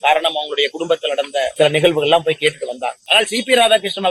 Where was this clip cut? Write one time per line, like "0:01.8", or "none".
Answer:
0:01.5
0:03.0